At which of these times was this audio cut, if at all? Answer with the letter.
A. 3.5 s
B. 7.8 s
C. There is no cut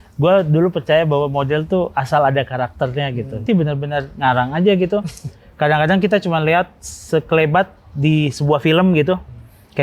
A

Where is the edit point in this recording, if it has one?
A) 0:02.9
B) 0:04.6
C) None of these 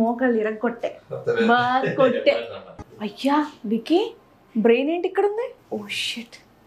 A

